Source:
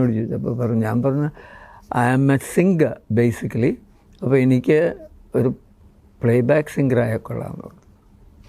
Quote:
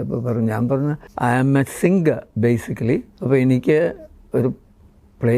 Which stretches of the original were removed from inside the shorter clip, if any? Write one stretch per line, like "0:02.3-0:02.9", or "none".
0:01.4-0:01.8
0:03.9-0:04.1